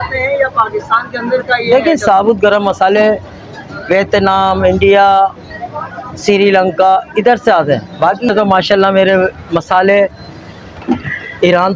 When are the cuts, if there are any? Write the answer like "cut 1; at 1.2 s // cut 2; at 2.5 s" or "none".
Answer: cut 1; at 8.3 s

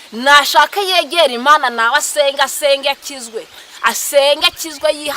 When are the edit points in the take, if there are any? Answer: none

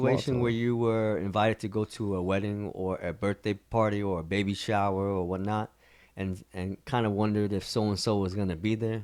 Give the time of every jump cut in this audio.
none

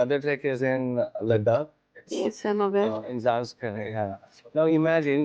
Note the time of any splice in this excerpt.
cut 1; at 4.2 s

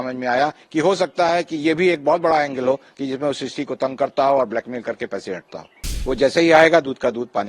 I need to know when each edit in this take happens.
cut 1; at 5.9 s

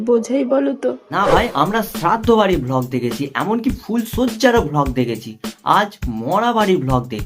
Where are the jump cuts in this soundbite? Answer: cut 1; at 1.0 s

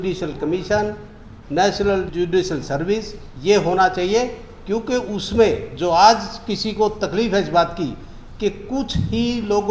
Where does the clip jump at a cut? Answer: cut 1; at 2.1 s

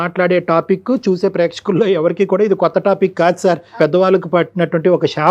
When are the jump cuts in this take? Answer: cut 1; at 3.7 s

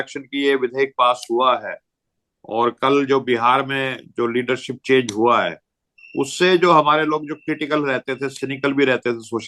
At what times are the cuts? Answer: none

